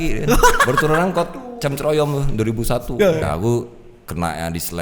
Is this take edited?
yes; 1 cut; at 3.2 s

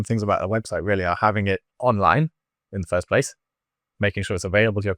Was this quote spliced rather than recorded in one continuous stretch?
yes; 1 cut; at 1.7 s

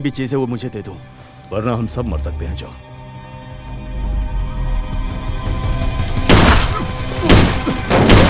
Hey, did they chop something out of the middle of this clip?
yes; 1 cut; at 6.8 s

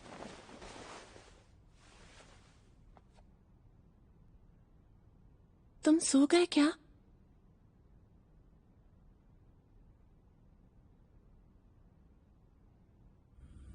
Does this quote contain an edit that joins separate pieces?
yes; 1 cut; at 4.3 s

